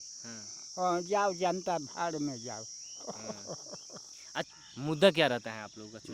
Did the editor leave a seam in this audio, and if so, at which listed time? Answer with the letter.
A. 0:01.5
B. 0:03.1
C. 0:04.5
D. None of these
C